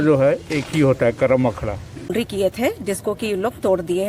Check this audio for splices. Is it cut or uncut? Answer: cut